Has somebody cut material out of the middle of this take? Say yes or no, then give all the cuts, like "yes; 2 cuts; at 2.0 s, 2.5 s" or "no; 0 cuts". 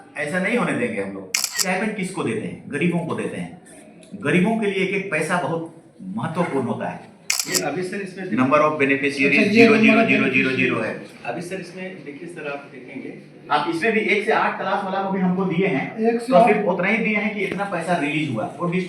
yes; 2 cuts; at 1.6 s, 7.6 s